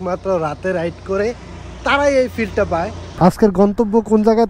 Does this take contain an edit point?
yes; 1 cut; at 3.0 s

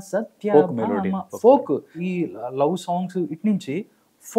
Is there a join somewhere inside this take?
yes; 1 cut; at 2.0 s

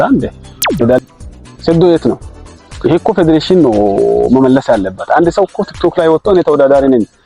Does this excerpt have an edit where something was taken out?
yes; 1 cut; at 1.0 s

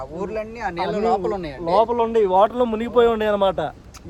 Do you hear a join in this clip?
no; 0 cuts

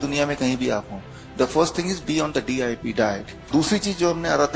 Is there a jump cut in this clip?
yes; 1 cut; at 3.5 s

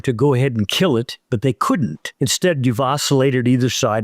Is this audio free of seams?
no; 1 cut; at 2.0 s

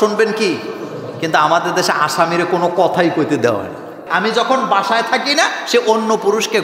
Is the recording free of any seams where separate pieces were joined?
no; 1 cut; at 4.0 s

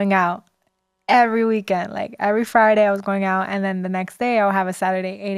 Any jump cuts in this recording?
no; 0 cuts

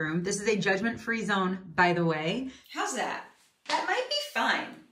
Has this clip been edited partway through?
yes; 1 cut; at 2.5 s

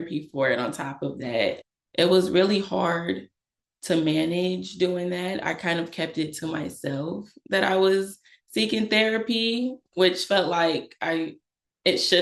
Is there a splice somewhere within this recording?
no; 0 cuts

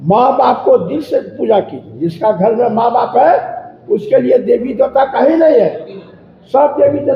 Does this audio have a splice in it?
no; 0 cuts

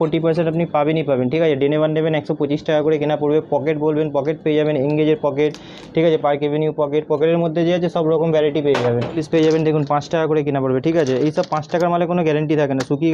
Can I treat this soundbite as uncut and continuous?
yes; 0 cuts

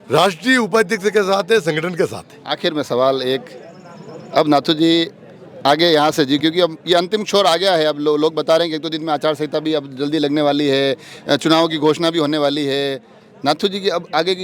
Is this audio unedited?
yes; 0 cuts

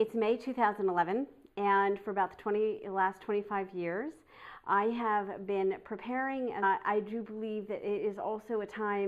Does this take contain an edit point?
no; 0 cuts

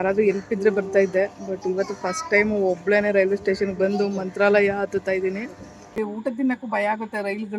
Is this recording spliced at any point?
yes; 1 cut; at 5.9 s

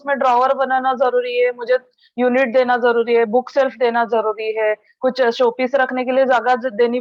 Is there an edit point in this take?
no; 0 cuts

